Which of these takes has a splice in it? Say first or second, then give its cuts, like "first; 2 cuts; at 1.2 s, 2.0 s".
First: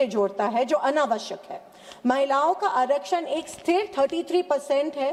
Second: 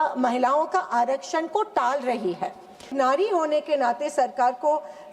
second; 1 cut; at 2.9 s